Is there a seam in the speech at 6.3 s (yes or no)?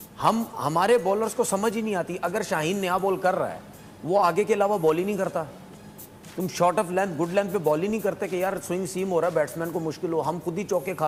no